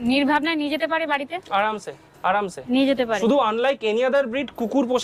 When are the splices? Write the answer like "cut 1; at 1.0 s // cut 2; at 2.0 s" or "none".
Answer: none